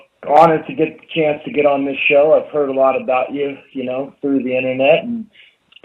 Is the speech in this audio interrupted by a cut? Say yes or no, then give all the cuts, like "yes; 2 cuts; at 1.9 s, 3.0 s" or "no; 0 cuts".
no; 0 cuts